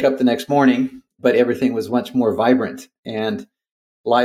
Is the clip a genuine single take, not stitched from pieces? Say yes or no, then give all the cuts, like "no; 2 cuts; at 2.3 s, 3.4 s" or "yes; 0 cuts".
yes; 0 cuts